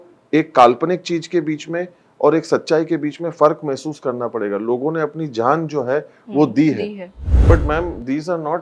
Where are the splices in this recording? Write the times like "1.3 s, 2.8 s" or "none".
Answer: 7.4 s